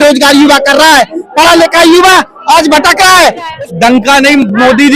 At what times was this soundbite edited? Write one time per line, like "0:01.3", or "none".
0:03.6